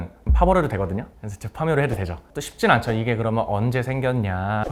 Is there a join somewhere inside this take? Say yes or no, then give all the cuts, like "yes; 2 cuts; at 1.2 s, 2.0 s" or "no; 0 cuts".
no; 0 cuts